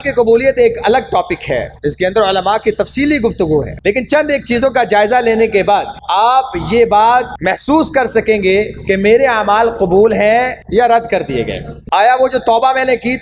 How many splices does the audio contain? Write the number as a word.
five